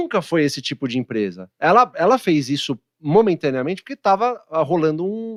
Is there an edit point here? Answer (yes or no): no